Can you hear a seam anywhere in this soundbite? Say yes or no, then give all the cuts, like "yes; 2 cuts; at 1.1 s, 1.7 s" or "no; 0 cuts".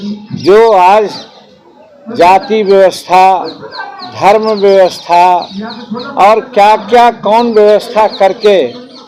no; 0 cuts